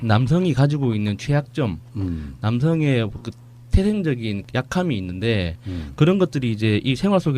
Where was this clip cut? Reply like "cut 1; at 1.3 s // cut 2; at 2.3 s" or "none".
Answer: cut 1; at 1.7 s